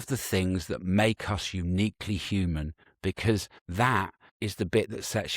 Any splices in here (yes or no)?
yes